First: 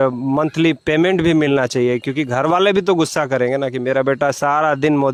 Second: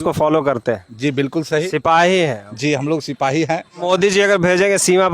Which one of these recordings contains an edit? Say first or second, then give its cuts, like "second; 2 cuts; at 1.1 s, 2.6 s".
second; 1 cut; at 3.8 s